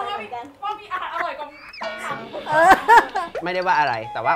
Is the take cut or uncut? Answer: uncut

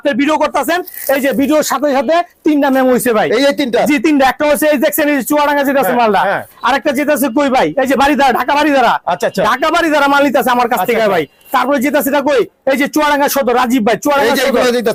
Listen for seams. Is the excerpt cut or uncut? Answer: uncut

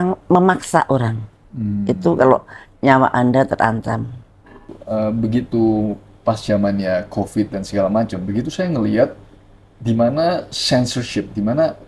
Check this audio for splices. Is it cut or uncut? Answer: cut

